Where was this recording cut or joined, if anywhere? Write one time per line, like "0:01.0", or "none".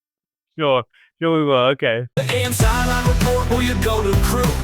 0:02.1

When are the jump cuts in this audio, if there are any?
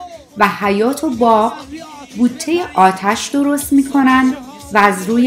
none

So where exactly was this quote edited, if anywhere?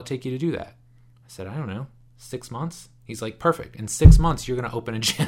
none

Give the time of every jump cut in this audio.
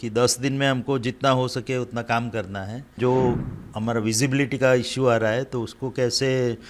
0:03.0

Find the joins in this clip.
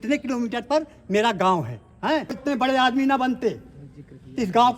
0:02.4

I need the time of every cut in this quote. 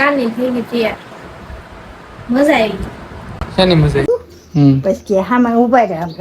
0:04.0

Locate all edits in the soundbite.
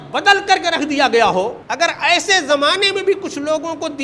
0:01.6

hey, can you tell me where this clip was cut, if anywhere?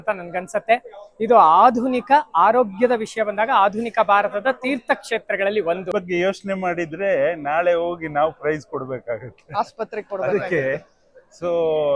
0:05.9

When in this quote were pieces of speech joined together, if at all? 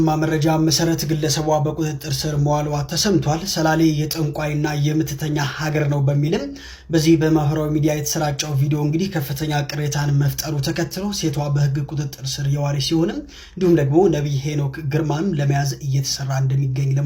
none

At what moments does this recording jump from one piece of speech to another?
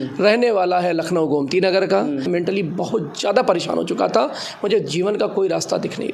0:02.3

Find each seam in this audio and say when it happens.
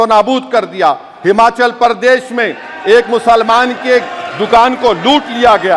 none

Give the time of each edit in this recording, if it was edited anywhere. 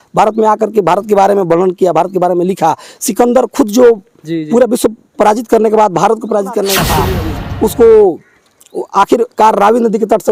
0:07.0

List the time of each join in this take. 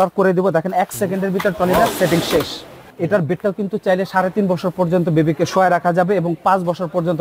0:02.8

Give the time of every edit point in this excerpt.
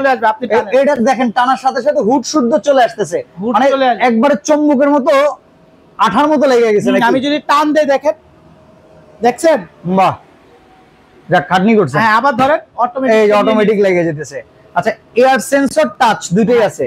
none

